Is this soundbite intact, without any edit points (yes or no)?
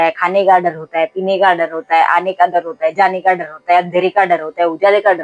yes